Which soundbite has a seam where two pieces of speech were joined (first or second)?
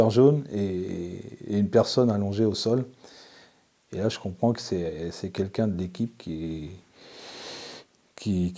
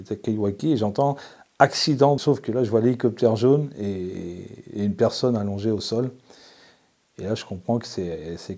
second